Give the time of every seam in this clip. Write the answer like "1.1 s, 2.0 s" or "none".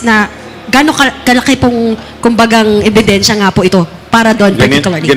none